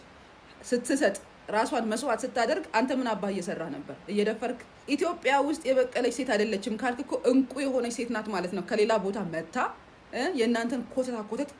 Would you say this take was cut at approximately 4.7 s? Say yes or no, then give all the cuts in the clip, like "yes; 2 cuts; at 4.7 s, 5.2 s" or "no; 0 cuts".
yes; 1 cut; at 4.7 s